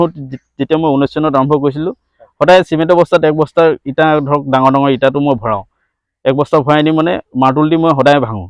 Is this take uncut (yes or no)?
yes